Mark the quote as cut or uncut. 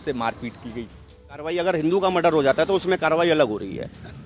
cut